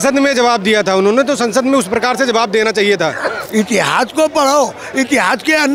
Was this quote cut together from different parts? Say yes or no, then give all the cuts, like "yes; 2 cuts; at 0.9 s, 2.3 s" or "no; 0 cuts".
yes; 1 cut; at 3.3 s